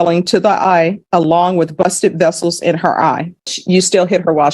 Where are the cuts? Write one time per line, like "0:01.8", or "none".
0:03.6